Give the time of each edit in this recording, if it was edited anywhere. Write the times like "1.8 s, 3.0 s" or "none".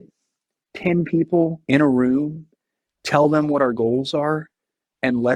1.6 s